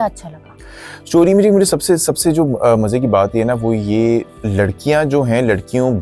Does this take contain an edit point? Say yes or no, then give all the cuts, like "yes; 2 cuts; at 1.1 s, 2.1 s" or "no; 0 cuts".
yes; 1 cut; at 4.3 s